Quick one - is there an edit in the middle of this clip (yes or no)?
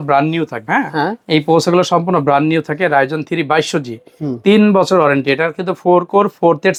no